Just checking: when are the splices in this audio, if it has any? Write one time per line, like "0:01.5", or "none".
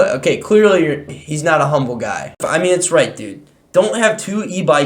0:02.4